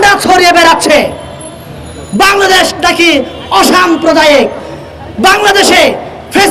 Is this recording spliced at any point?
no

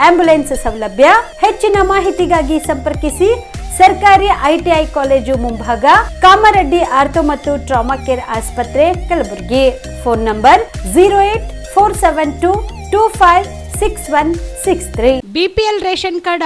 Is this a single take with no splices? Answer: no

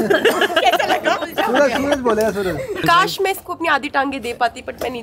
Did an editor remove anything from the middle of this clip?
no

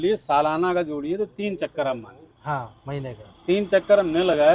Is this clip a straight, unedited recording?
yes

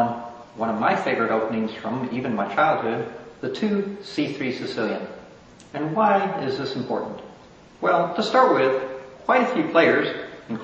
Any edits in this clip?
yes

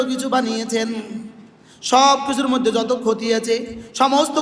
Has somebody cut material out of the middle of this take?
no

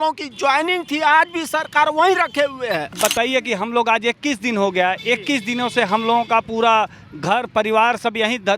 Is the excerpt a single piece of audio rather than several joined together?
no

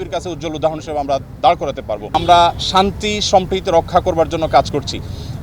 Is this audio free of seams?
no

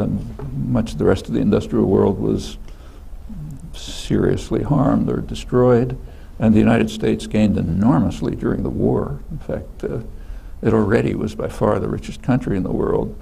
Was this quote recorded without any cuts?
no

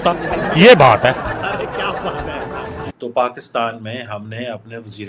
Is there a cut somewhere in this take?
yes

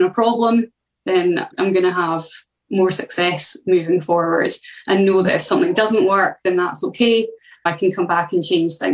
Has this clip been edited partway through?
no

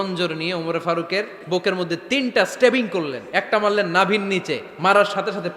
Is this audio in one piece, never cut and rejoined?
no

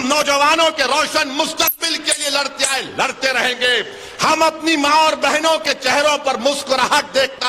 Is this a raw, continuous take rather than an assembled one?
yes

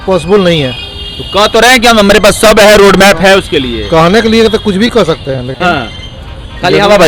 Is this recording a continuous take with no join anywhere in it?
yes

